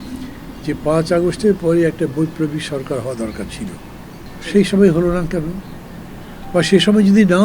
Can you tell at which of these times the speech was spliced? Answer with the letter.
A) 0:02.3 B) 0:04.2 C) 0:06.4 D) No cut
B